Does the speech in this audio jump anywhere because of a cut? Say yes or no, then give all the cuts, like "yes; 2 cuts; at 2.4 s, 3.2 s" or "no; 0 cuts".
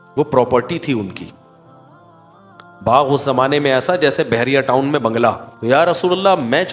yes; 1 cut; at 5.5 s